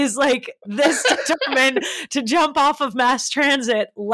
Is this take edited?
no; 0 cuts

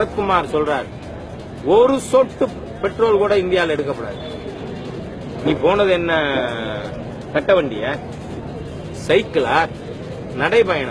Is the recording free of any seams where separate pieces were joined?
yes; 0 cuts

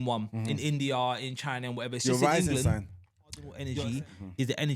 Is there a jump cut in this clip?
yes; 1 cut; at 3.6 s

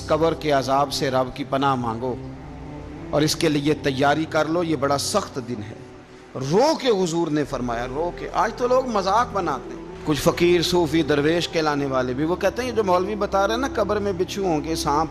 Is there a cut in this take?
no; 0 cuts

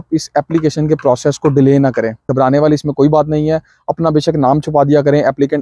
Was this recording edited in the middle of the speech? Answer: yes; 1 cut; at 2.3 s

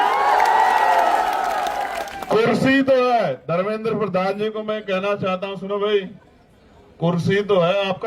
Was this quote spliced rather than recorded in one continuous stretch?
yes; 1 cut; at 2.1 s

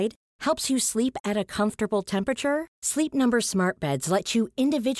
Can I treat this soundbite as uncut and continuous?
yes; 0 cuts

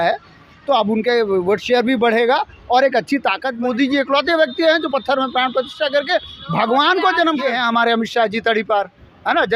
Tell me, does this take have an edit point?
yes; 2 cuts; at 3.5 s, 7.4 s

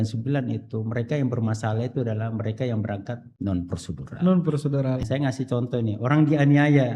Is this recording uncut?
no; 2 cuts; at 3.3 s, 5.0 s

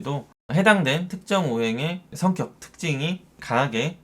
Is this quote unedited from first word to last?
no; 1 cut; at 2.1 s

